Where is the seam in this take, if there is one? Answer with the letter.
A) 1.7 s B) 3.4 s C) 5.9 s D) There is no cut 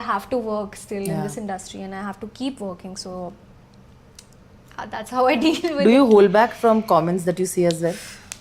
D